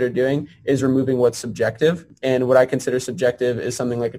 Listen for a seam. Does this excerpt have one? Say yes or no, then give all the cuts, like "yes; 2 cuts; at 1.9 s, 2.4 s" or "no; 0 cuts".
yes; 1 cut; at 2.1 s